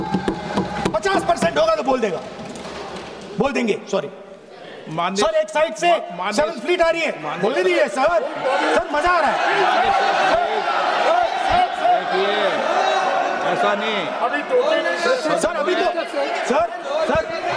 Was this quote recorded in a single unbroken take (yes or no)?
yes